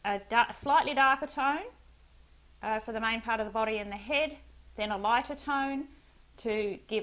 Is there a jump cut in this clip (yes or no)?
no